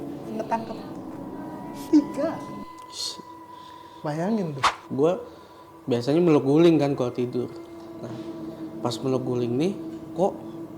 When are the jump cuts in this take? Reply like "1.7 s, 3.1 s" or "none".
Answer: 4.8 s